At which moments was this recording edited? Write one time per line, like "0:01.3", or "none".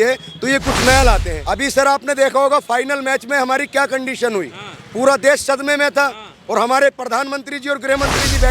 0:01.3